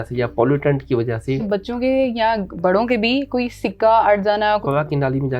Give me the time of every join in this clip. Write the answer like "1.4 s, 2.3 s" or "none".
1.4 s, 4.6 s